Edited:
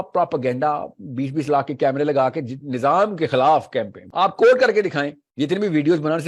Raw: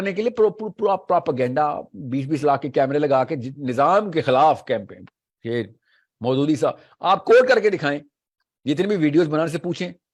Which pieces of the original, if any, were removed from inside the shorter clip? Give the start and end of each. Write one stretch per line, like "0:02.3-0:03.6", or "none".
0:05.0-0:06.9
0:08.1-0:08.5